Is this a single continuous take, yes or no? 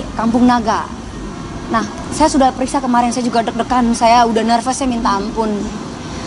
no